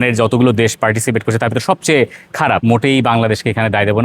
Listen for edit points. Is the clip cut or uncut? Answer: cut